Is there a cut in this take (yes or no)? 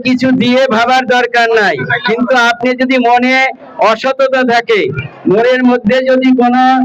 no